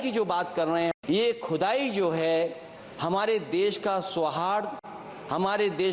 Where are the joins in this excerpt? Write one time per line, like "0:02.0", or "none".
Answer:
0:01.0